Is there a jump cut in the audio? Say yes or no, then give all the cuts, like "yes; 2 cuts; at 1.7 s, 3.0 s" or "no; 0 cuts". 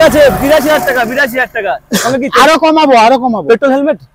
no; 0 cuts